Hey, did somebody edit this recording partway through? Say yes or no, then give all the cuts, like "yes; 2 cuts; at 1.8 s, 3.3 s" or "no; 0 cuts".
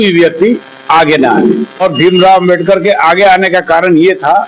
yes; 1 cut; at 1.8 s